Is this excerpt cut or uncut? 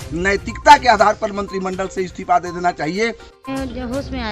cut